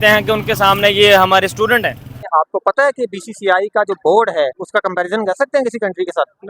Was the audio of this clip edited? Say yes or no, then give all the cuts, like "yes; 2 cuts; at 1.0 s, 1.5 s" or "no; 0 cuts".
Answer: yes; 2 cuts; at 2.1 s, 4.6 s